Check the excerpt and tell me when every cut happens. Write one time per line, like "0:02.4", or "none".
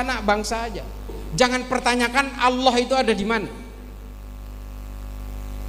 0:01.1